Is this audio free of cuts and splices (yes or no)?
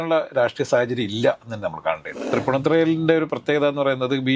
no